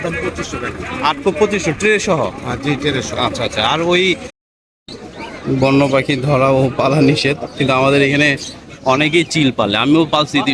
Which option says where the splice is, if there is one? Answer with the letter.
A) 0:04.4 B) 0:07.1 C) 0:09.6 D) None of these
A